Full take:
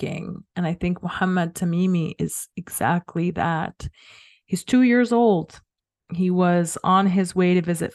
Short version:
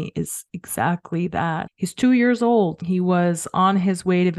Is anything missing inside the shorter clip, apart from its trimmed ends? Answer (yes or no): yes